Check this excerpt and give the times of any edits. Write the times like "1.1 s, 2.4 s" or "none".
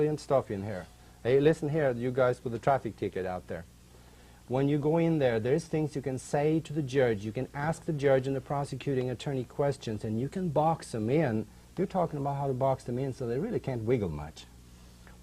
7.3 s